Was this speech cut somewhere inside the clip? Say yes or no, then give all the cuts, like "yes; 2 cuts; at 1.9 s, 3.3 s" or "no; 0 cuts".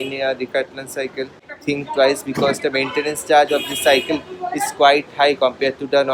no; 0 cuts